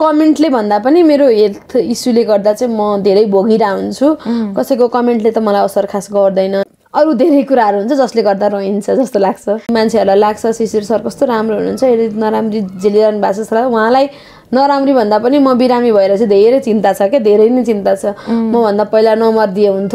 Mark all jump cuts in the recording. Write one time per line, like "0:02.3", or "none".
0:06.6
0:09.7